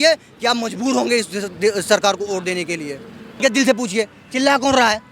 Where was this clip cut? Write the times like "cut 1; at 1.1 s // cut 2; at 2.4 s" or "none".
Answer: cut 1; at 3.2 s